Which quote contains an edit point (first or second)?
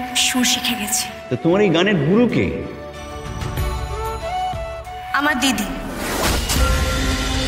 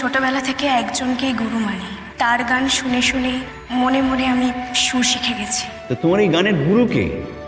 second